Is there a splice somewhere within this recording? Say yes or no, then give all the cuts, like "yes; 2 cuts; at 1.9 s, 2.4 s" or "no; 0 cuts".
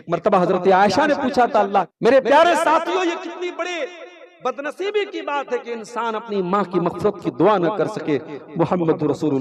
yes; 1 cut; at 1.9 s